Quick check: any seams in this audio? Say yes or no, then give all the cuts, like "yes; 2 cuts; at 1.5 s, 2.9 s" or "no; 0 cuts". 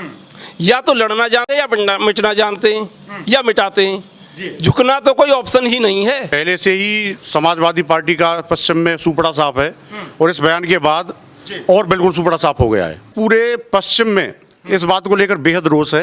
yes; 2 cuts; at 6.4 s, 13.1 s